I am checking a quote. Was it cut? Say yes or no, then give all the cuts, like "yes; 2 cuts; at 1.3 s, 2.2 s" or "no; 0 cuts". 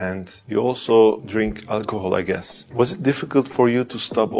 no; 0 cuts